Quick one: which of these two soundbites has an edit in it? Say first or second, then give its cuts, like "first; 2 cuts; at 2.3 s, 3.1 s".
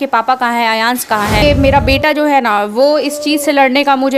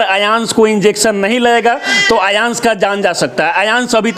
first; 1 cut; at 1.4 s